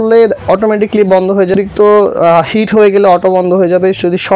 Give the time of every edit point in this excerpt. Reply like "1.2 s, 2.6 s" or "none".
1.5 s